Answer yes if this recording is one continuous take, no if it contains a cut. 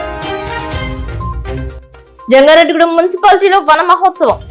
no